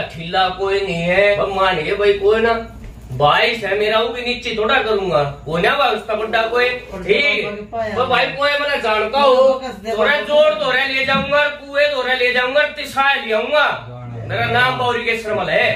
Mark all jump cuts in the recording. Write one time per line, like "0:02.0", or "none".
0:01.4
0:06.9